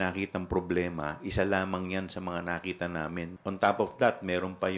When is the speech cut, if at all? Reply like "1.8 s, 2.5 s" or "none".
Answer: 3.3 s